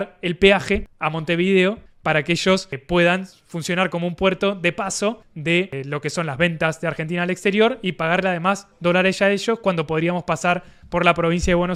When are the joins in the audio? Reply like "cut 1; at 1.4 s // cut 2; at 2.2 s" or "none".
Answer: none

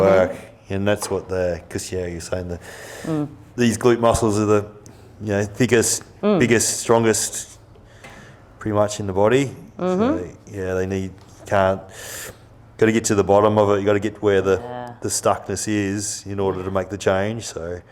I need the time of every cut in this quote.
none

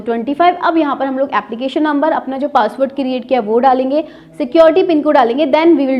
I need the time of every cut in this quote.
none

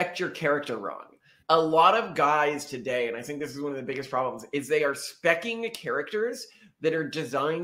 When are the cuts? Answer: cut 1; at 1.2 s

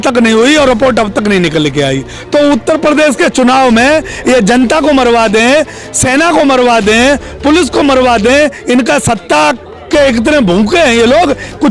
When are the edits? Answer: none

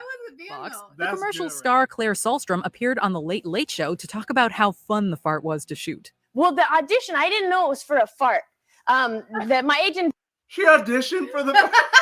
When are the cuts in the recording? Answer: cut 1; at 0.9 s

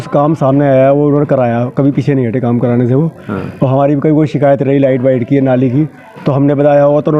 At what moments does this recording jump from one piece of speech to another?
none

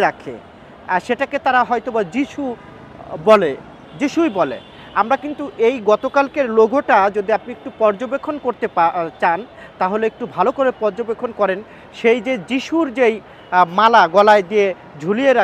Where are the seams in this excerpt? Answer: none

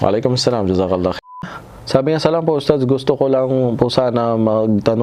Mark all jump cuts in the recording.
cut 1; at 1.4 s

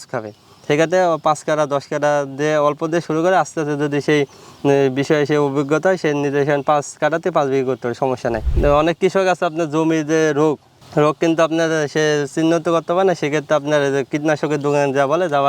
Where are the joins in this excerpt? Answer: cut 1; at 8.5 s

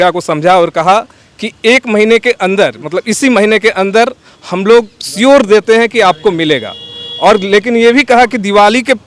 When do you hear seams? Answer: none

